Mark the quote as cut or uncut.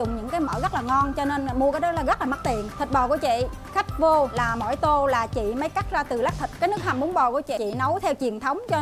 cut